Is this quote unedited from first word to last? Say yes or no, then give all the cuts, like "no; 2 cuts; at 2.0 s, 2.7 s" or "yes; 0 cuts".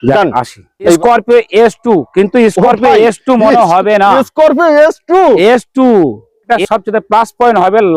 no; 2 cuts; at 1.0 s, 6.5 s